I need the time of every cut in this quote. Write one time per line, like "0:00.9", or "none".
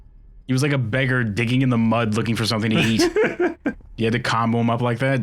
0:03.9